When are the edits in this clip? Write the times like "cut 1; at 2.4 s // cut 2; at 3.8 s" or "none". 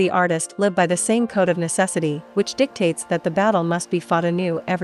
none

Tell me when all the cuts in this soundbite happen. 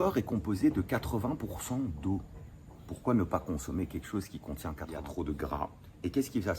cut 1; at 5.0 s

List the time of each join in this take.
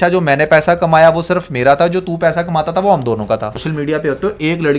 cut 1; at 3.7 s

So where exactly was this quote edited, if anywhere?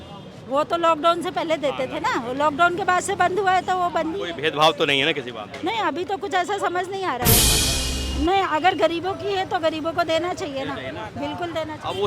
cut 1; at 7.5 s

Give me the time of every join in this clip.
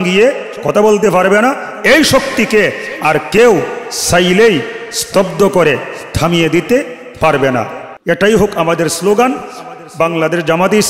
cut 1; at 7.9 s

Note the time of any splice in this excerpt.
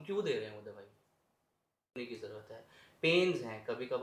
cut 1; at 1.9 s

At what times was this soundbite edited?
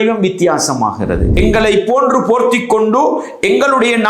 cut 1; at 1.3 s

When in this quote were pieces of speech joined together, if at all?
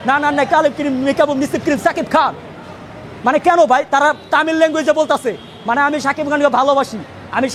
none

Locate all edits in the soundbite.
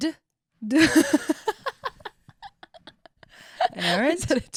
none

